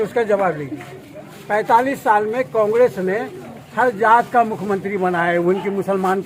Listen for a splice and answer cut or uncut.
uncut